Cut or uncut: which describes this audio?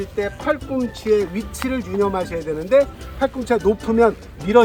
uncut